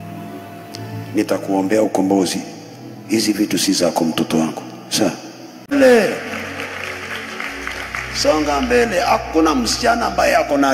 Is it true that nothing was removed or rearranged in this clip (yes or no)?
no